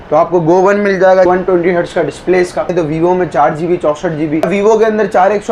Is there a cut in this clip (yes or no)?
yes